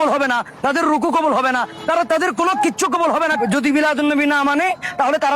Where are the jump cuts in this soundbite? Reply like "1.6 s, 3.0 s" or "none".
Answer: 3.4 s

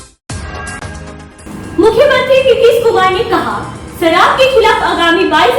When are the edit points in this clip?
1.1 s

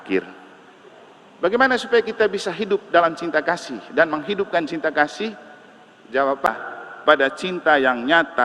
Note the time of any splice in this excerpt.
6.5 s

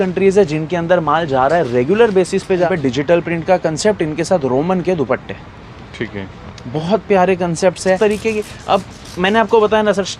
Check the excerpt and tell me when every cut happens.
2.7 s, 8.0 s

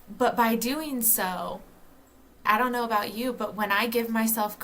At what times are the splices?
2.4 s

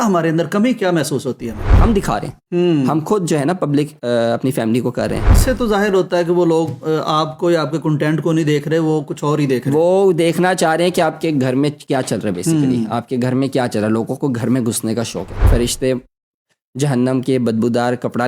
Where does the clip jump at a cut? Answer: 1.8 s, 5.3 s, 15.5 s

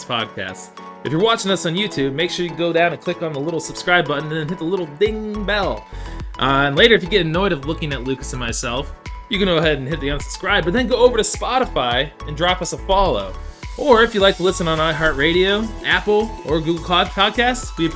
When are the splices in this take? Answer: none

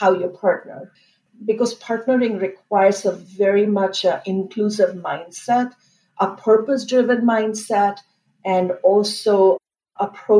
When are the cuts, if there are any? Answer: 1.0 s

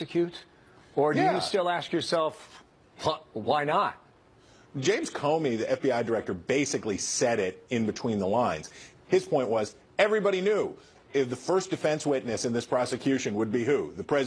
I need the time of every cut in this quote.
none

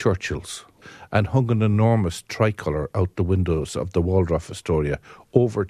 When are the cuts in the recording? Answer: none

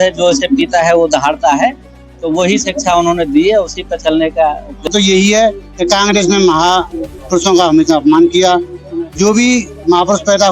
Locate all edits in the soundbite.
4.9 s

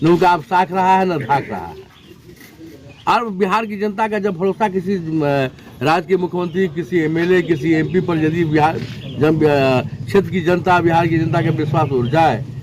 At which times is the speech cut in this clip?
none

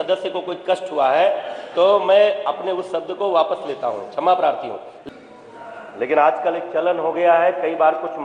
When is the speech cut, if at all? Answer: 5.0 s

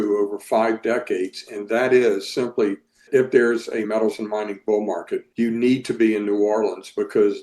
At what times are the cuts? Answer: 3.1 s, 3.9 s, 5.3 s

